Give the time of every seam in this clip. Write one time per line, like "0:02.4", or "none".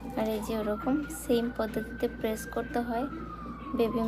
none